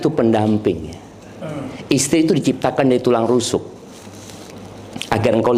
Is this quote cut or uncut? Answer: uncut